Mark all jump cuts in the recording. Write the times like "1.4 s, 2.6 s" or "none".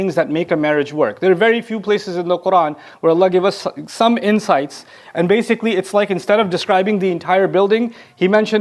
none